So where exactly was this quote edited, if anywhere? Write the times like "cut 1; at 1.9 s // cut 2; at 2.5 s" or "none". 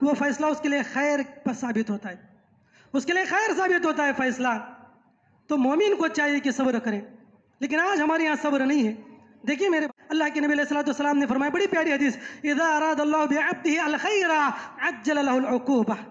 cut 1; at 9.9 s